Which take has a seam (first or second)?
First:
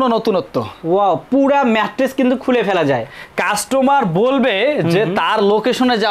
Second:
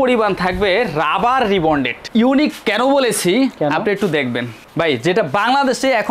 second